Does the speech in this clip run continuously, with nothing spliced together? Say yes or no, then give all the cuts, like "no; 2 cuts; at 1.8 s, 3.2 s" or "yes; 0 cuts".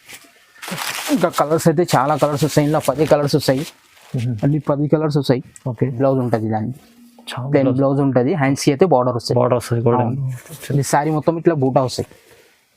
no; 1 cut; at 5.9 s